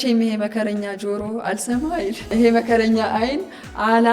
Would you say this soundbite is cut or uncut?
cut